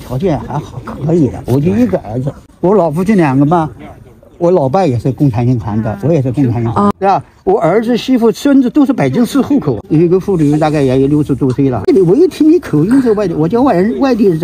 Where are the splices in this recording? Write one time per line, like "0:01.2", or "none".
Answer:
0:06.9
0:09.8
0:11.9